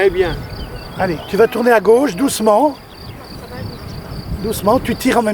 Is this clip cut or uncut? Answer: uncut